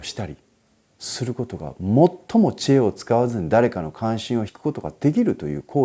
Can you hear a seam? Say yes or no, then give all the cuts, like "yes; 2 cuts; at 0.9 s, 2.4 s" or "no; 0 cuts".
yes; 1 cut; at 4.5 s